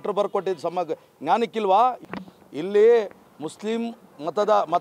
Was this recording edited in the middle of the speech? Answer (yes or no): yes